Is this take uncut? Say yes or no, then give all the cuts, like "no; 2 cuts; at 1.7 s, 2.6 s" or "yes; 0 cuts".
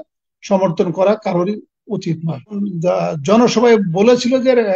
no; 1 cut; at 2.6 s